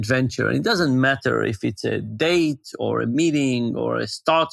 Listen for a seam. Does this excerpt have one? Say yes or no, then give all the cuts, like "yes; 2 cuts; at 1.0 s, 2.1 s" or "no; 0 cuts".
no; 0 cuts